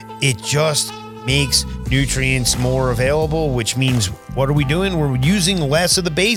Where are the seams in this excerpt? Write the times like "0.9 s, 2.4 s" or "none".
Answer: none